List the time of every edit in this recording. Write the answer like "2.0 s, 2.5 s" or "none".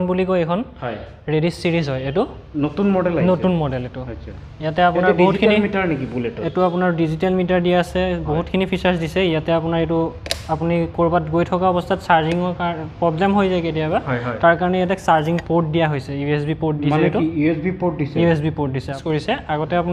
19.0 s